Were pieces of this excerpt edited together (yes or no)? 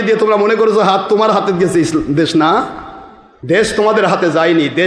no